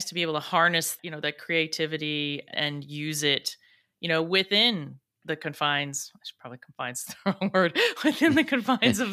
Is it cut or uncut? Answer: cut